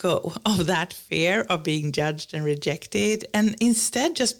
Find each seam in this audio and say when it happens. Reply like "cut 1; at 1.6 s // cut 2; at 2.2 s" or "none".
none